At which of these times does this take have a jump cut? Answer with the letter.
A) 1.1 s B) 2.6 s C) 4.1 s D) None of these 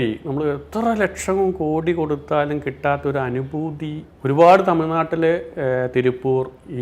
C